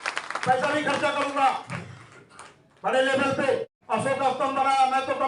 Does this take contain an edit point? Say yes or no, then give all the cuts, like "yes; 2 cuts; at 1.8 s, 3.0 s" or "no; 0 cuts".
yes; 1 cut; at 3.8 s